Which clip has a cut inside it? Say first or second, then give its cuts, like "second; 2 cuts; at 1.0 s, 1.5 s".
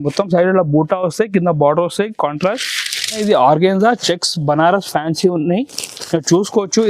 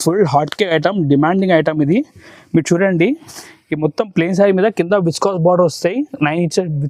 first; 1 cut; at 3.2 s